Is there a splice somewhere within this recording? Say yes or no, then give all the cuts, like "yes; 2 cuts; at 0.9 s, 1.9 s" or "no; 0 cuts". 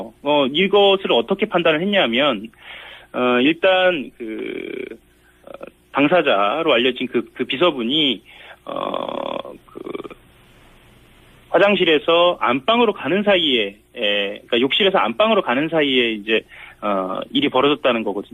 no; 0 cuts